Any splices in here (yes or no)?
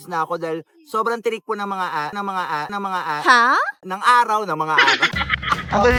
no